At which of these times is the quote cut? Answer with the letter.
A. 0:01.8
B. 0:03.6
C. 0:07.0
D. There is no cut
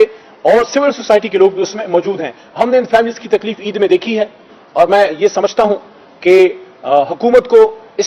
D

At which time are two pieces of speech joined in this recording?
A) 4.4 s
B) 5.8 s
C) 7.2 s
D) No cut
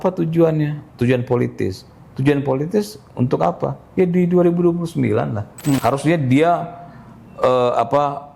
B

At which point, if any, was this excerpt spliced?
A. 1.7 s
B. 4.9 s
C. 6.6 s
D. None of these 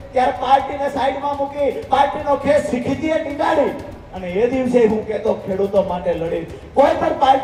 D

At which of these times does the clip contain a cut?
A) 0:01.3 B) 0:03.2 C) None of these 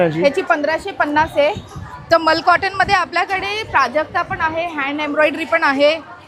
C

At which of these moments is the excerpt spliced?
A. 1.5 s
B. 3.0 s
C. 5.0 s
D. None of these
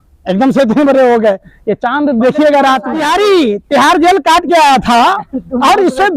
B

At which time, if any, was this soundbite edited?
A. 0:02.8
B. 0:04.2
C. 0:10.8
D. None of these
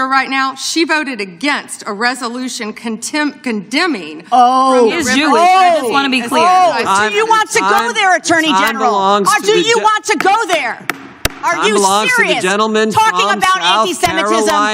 D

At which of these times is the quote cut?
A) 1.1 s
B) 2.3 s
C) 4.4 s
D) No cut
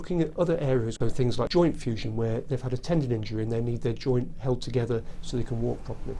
A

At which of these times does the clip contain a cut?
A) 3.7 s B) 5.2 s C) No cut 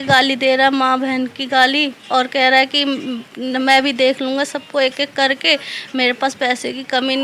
C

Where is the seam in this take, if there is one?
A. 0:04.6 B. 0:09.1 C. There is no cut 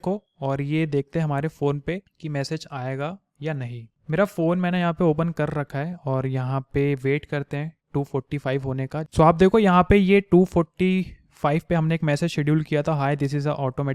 B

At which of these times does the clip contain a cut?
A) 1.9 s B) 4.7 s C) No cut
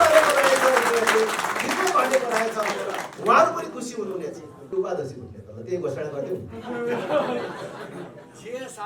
B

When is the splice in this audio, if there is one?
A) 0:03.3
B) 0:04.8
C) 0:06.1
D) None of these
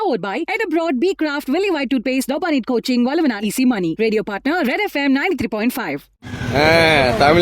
C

